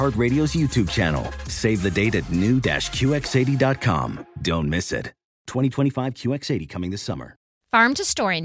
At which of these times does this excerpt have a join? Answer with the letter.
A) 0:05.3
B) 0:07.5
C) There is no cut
B